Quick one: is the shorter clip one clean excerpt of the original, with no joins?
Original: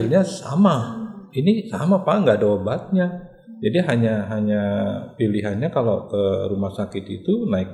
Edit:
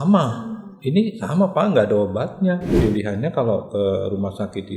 no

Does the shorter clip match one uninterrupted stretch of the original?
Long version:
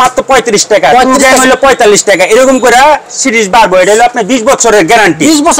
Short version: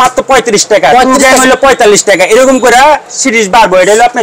yes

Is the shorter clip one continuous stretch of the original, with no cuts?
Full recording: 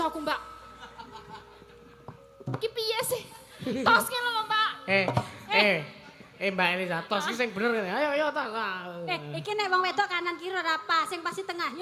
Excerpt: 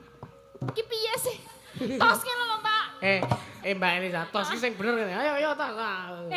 no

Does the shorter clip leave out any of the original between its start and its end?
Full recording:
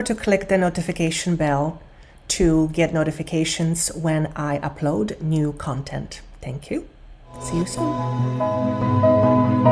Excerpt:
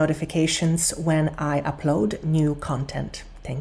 no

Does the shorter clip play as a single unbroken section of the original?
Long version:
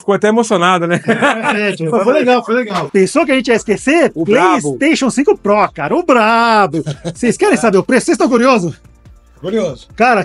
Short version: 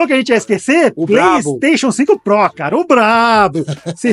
yes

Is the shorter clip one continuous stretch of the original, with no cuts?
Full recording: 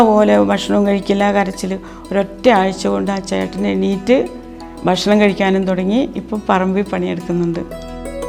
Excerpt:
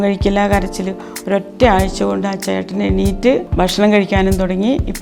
no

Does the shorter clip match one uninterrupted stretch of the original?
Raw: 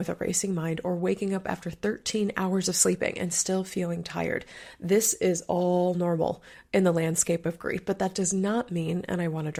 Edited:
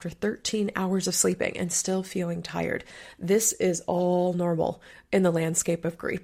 yes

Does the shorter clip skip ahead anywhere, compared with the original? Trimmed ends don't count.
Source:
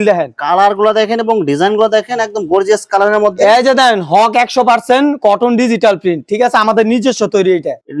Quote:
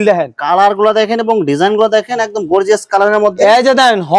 no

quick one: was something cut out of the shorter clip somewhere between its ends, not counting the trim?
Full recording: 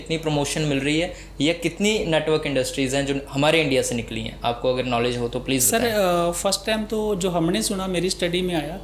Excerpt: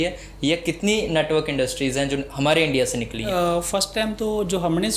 yes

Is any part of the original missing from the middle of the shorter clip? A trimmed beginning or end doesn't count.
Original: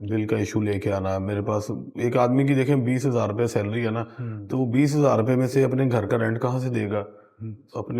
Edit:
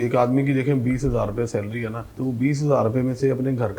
yes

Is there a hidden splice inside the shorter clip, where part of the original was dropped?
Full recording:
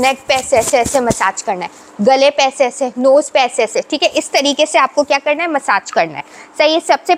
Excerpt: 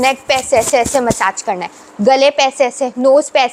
no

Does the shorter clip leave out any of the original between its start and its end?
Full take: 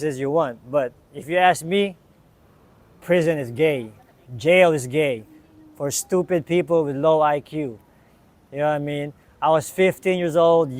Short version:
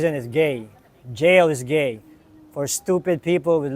no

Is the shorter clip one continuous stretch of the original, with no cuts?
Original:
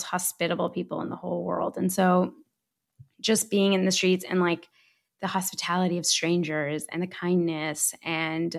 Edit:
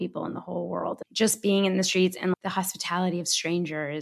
no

